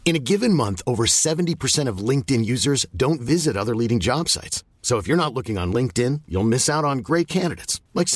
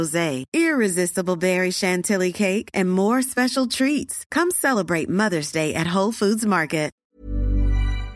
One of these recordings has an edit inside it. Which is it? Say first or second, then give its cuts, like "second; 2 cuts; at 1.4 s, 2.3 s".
second; 1 cut; at 7.0 s